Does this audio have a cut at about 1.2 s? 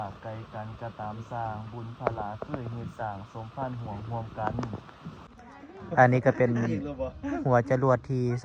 no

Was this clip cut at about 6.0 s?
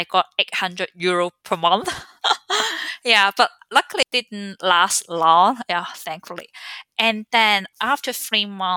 no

